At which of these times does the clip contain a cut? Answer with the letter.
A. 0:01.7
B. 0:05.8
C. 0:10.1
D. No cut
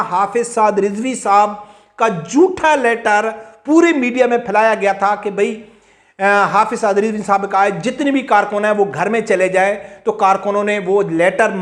D